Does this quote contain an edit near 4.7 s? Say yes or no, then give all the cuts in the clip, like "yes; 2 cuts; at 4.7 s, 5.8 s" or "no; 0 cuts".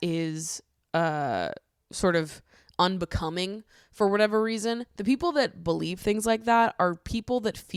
no; 0 cuts